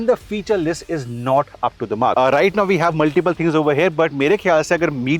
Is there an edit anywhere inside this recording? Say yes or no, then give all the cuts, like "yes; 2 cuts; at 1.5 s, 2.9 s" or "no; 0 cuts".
yes; 1 cut; at 2.1 s